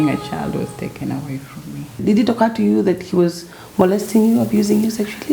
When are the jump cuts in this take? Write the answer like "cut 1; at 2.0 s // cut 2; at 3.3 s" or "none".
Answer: cut 1; at 1.8 s